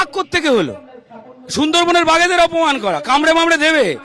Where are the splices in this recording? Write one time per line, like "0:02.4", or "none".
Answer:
none